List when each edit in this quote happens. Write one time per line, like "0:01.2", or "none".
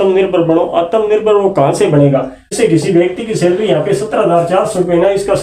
0:02.4